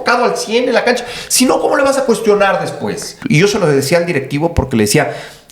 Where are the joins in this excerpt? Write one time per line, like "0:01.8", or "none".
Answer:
0:03.2